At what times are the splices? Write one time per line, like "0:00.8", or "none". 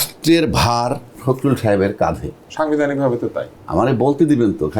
0:01.2
0:03.5